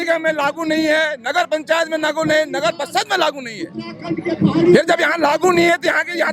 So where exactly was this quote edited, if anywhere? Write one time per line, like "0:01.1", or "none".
none